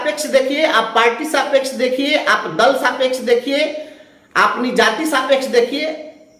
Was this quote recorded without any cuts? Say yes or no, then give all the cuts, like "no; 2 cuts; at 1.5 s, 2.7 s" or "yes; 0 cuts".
yes; 0 cuts